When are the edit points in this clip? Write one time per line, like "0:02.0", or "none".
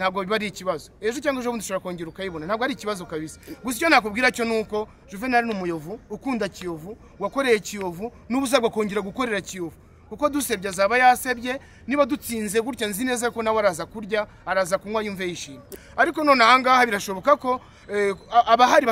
0:15.7